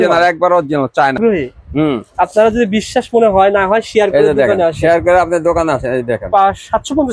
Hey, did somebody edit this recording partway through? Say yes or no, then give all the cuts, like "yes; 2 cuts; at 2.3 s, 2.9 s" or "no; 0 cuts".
yes; 1 cut; at 1.1 s